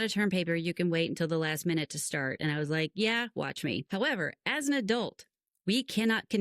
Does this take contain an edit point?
yes; 1 cut; at 3.8 s

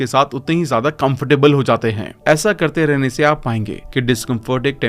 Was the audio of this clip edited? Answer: no; 0 cuts

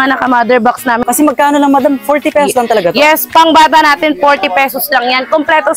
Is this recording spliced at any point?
yes; 1 cut; at 1.0 s

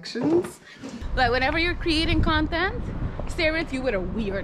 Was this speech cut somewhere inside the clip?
yes; 1 cut; at 0.9 s

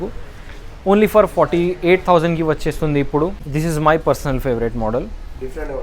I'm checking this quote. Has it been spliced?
yes; 1 cut; at 3.4 s

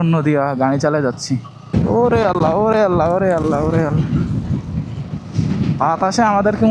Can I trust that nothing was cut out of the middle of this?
no; 1 cut; at 1.6 s

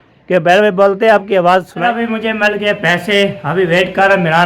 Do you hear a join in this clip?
yes; 1 cut; at 1.7 s

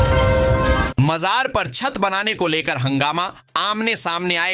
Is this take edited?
yes; 1 cut; at 1.0 s

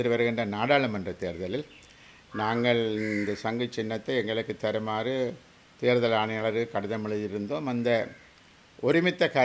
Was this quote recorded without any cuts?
yes; 0 cuts

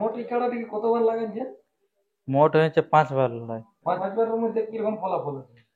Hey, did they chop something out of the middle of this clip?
yes; 1 cut; at 4.0 s

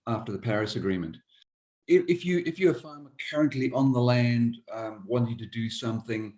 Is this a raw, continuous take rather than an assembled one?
no; 1 cut; at 1.5 s

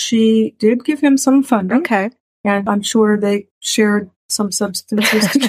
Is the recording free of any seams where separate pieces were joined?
no; 1 cut; at 2.6 s

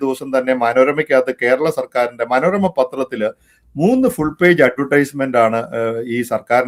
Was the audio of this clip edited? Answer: no; 0 cuts

